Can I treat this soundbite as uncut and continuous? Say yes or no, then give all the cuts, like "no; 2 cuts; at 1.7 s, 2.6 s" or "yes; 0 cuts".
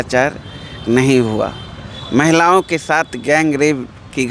yes; 0 cuts